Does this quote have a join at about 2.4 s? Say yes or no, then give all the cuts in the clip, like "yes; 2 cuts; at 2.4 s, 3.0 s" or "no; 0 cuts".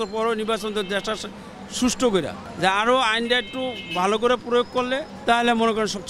yes; 2 cuts; at 2.4 s, 5.1 s